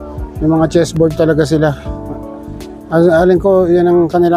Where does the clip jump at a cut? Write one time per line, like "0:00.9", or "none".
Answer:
none